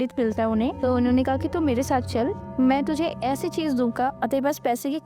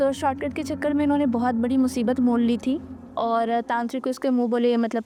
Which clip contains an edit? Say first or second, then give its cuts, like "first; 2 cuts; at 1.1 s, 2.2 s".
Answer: first; 3 cuts; at 0.8 s, 2.4 s, 4.1 s